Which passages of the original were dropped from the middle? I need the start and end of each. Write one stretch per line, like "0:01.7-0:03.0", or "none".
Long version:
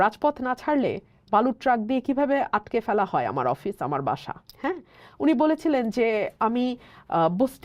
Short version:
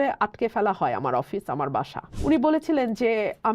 0:04.4-0:05.0

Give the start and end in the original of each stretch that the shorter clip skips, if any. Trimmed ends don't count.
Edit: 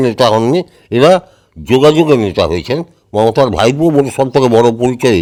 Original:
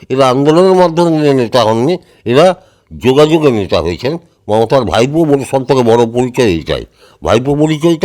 none

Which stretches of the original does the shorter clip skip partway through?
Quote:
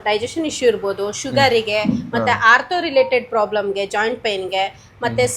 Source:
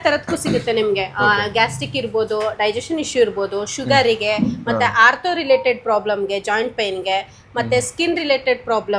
none

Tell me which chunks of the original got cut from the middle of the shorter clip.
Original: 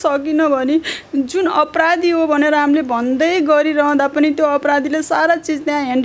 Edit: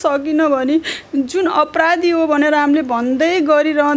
none

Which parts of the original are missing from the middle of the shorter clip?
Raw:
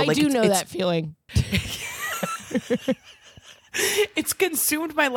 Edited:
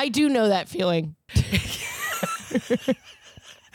none

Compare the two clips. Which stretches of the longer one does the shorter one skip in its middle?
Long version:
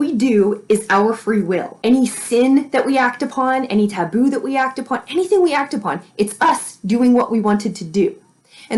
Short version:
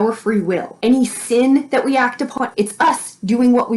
0:03.4-0:06.0

